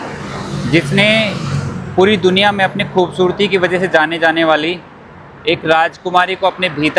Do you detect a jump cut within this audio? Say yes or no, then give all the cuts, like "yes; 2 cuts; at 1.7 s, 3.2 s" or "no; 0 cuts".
no; 0 cuts